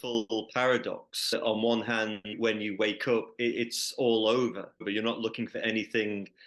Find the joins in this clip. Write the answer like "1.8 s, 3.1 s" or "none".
1.3 s, 2.4 s, 4.8 s